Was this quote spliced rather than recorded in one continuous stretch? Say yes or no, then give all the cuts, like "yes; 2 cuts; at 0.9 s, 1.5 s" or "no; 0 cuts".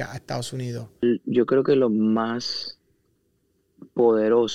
yes; 1 cut; at 1.0 s